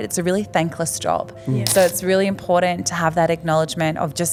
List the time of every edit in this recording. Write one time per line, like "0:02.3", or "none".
none